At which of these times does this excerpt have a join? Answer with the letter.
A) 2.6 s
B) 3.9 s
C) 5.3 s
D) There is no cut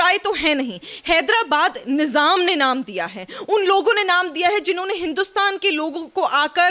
D